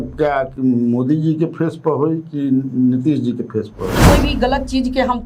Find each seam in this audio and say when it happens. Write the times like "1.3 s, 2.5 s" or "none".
4.1 s